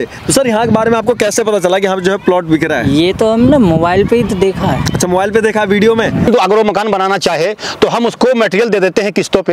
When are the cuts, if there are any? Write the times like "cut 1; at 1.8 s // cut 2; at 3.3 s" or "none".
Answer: cut 1; at 6.3 s